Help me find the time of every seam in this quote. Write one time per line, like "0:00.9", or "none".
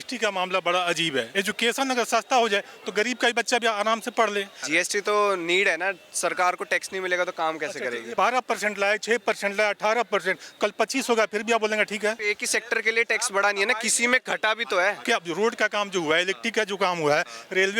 0:01.3
0:04.6
0:08.0
0:12.2
0:15.0